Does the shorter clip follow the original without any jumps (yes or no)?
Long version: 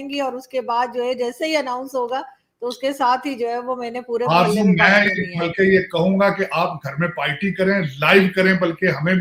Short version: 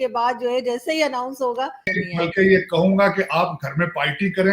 no